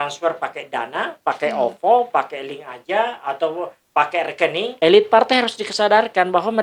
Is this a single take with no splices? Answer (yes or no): no